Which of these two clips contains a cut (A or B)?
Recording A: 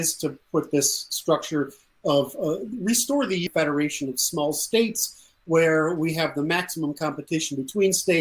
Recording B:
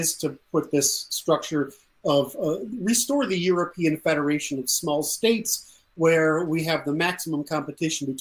A